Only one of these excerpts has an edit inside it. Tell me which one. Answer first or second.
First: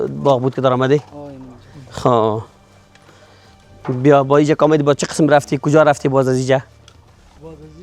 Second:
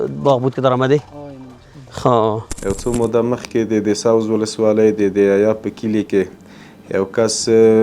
second